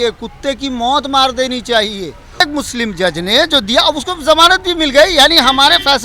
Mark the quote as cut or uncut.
cut